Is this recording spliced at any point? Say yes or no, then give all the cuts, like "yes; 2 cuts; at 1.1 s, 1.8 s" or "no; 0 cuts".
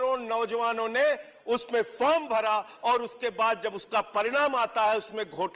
no; 0 cuts